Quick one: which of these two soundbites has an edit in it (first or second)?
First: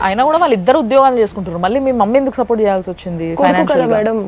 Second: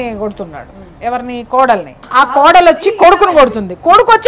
second